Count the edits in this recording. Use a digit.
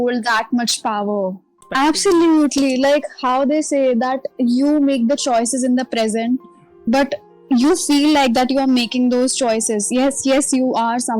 1